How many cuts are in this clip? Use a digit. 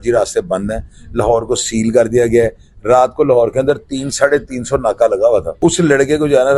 1